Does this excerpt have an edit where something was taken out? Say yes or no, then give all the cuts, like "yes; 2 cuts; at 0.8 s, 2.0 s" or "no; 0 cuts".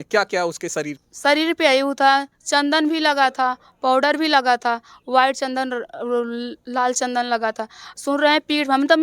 yes; 1 cut; at 1.0 s